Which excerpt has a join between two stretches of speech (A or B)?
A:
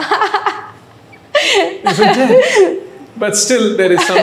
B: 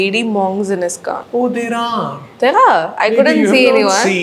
B